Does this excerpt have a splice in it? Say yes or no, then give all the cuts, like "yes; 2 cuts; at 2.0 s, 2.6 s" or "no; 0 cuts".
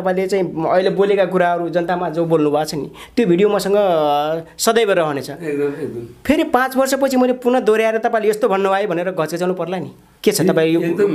no; 0 cuts